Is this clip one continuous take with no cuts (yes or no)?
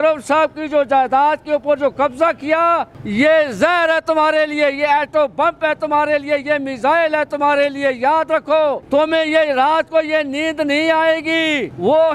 yes